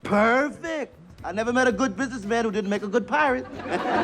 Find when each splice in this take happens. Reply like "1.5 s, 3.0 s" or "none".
none